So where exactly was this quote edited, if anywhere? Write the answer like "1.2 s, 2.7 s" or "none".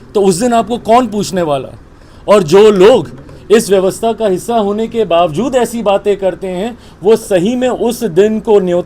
none